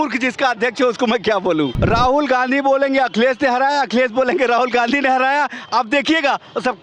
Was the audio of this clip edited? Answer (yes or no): yes